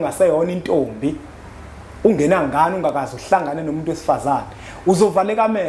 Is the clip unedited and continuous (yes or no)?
yes